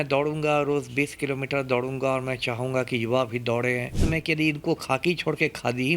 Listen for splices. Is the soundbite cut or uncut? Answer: cut